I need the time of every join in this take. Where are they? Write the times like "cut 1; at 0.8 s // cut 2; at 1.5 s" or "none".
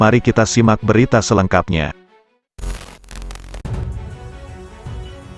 cut 1; at 3.6 s